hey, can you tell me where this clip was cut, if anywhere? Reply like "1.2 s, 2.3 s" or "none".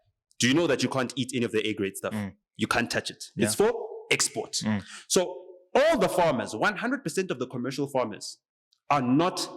none